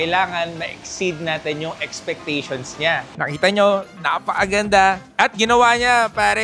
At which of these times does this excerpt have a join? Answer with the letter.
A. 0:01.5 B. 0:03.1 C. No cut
B